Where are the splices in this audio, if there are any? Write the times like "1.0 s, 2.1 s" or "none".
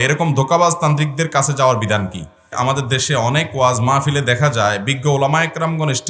2.4 s